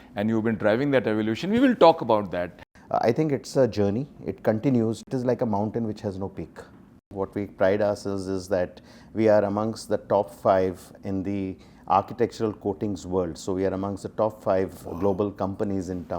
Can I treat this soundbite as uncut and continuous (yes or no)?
no